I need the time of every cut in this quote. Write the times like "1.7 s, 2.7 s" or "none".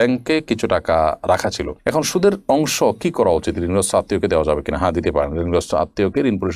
none